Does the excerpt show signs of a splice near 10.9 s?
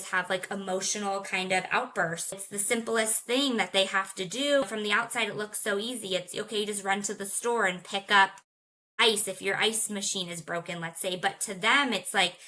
no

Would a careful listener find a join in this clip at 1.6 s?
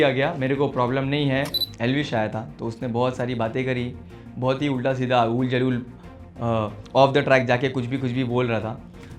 yes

